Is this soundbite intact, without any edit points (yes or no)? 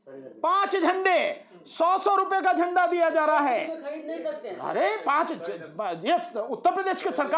yes